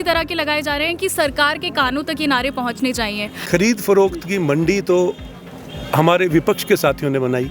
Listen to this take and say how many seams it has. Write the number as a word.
one